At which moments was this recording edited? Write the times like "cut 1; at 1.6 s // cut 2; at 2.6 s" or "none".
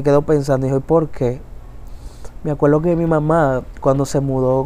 none